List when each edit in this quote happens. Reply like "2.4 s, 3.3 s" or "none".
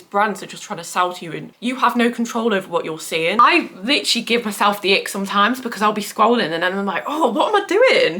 3.4 s

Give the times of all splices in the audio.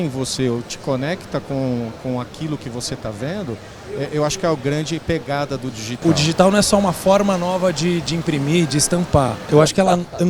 6.0 s, 9.4 s

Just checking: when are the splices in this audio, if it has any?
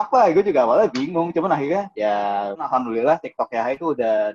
2.2 s

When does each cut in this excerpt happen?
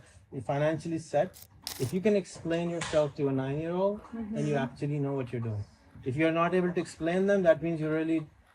1.6 s

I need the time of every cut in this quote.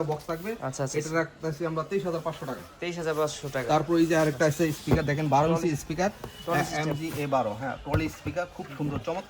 none

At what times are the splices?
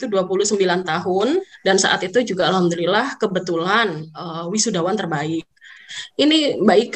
1.5 s, 5.9 s

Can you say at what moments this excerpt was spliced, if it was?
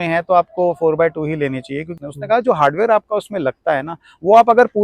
2.0 s

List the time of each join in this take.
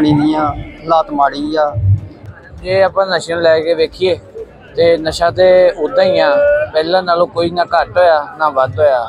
2.1 s

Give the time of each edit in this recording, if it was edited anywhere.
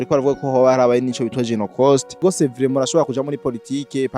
2.2 s

